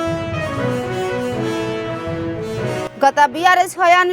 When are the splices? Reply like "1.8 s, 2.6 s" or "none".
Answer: none